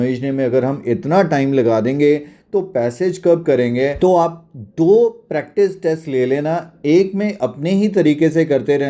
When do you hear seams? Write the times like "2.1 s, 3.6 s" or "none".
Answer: 3.9 s